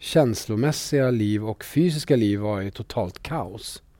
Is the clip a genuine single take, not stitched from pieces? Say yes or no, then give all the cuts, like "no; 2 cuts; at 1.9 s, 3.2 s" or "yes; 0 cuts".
yes; 0 cuts